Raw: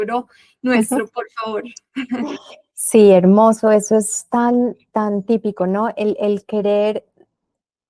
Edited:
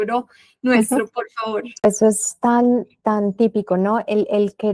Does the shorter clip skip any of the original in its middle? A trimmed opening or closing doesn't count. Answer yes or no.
yes